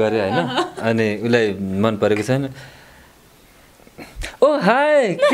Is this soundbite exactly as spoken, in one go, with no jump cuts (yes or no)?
yes